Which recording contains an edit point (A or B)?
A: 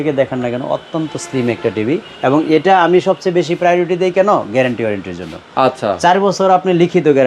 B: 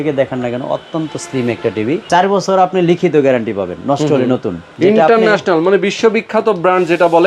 B